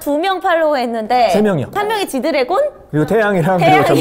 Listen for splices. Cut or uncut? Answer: cut